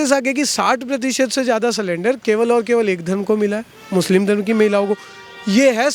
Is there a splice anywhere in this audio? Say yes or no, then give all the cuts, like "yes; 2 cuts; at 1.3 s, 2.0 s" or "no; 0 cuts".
no; 0 cuts